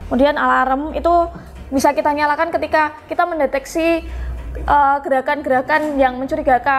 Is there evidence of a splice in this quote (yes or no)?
no